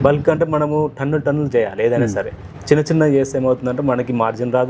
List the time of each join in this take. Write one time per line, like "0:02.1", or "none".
none

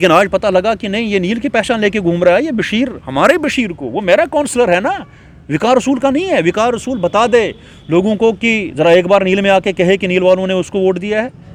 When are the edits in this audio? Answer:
none

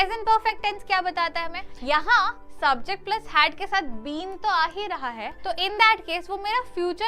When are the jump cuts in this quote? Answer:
0:01.6
0:05.3

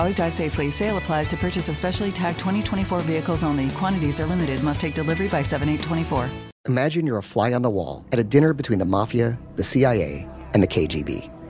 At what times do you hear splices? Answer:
0:06.5

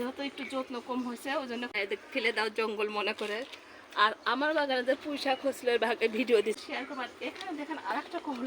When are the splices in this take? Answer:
0:01.7
0:06.6

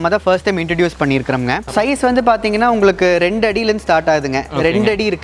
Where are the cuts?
0:01.7

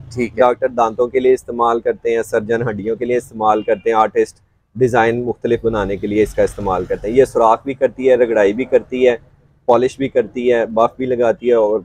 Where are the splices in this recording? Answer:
none

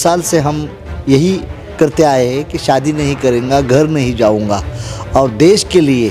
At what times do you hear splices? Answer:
none

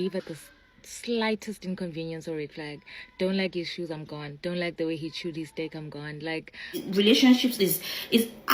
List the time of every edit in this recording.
0:06.7

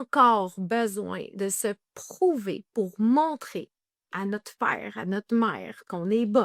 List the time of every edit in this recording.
none

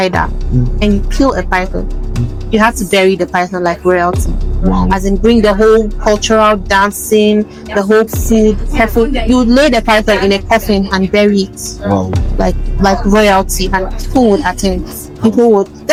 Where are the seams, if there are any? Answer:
none

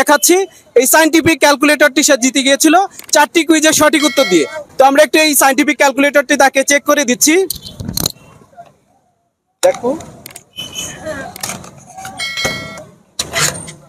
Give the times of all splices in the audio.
none

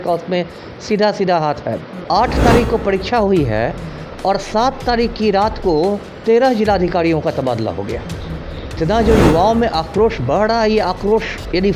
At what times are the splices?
0:02.0
0:08.8

